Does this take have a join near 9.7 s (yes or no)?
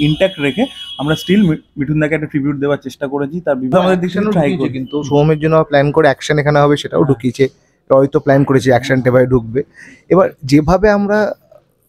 no